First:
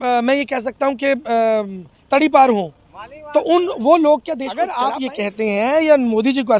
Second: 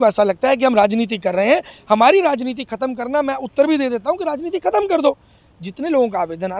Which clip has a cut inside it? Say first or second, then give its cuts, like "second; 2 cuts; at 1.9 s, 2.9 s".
first; 1 cut; at 4.6 s